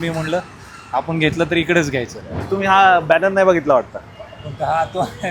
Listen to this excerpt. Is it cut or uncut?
cut